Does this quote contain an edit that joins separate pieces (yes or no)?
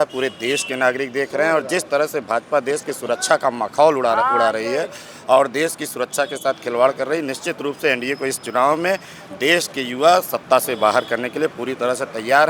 no